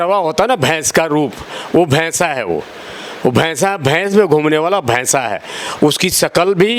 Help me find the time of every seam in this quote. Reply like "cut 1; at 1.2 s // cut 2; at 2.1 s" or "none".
none